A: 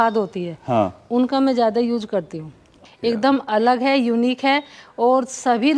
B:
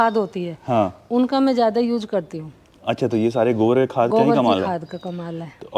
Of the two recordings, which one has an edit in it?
A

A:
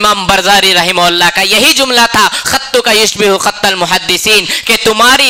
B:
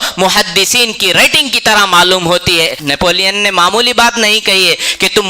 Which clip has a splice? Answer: B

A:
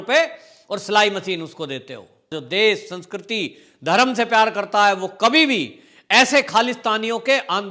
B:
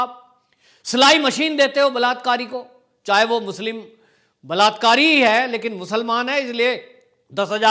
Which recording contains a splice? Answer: A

